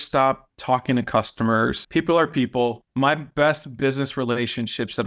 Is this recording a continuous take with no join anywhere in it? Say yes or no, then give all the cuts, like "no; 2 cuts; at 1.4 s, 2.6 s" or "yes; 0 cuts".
no; 2 cuts; at 1.8 s, 2.8 s